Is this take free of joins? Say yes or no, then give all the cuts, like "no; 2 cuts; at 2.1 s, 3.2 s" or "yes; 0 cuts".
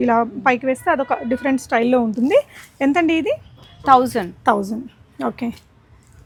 yes; 0 cuts